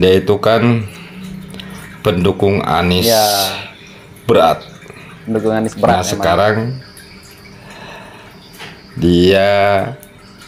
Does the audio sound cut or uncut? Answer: uncut